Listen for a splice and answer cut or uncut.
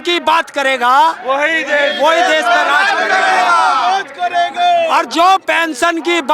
uncut